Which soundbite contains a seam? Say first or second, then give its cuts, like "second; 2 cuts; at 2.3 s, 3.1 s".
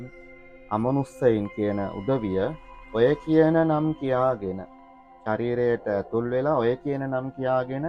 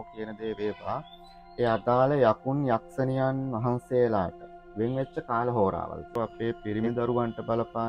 second; 1 cut; at 6.1 s